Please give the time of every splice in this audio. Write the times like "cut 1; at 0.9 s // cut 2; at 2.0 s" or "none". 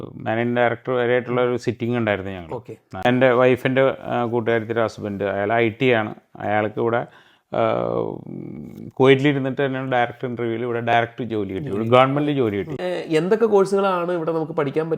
cut 1; at 2.9 s // cut 2; at 12.8 s